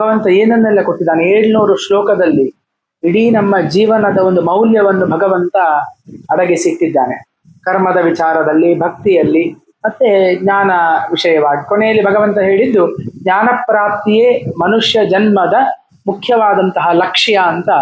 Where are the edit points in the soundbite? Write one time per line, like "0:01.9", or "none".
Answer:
none

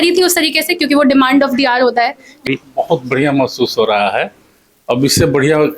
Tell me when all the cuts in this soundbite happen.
0:02.5

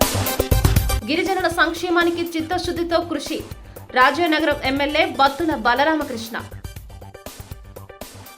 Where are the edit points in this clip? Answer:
0:01.0

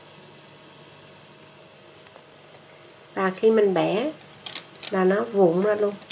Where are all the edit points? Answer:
none

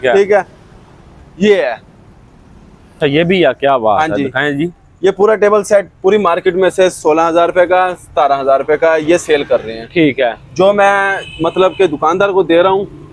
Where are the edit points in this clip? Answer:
0:02.9

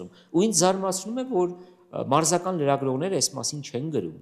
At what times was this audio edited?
none

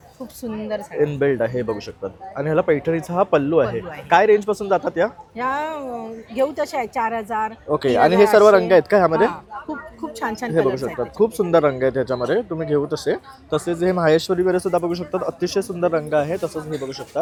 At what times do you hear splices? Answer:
none

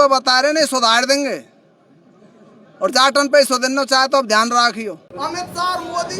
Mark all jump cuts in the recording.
0:05.1

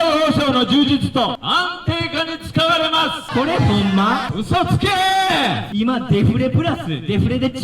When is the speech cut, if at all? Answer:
0:01.4
0:03.2
0:04.3
0:05.6

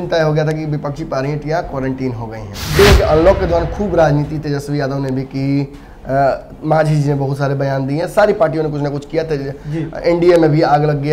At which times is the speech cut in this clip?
0:02.8

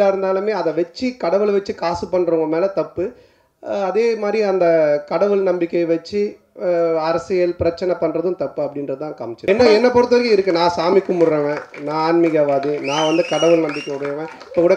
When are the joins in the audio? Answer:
0:09.5

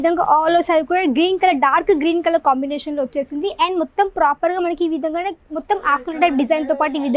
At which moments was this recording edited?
none

